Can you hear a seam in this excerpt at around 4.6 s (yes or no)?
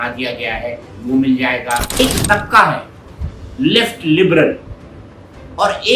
no